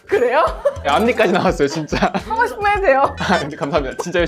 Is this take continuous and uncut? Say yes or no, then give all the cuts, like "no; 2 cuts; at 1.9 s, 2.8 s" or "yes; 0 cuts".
yes; 0 cuts